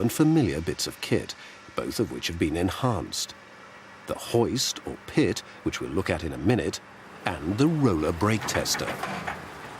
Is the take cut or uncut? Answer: cut